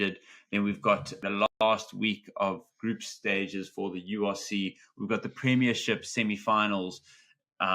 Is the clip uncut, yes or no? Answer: no